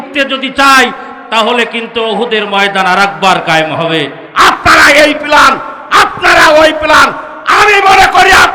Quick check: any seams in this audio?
yes; 1 cut; at 4.2 s

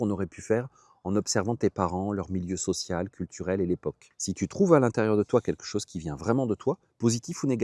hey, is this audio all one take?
no; 1 cut; at 4.1 s

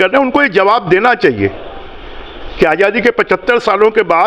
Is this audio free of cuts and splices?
yes; 0 cuts

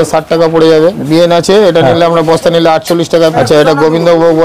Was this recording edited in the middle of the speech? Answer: yes; 2 cuts; at 1.0 s, 3.3 s

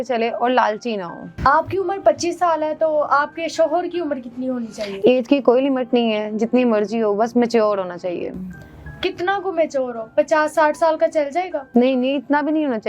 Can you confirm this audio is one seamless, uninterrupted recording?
yes; 0 cuts

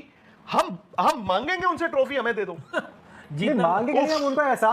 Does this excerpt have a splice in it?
no; 0 cuts

